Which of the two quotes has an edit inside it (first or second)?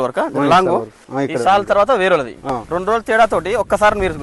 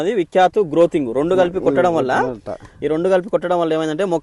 first